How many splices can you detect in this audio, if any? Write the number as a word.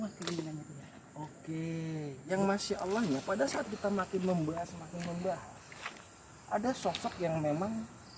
one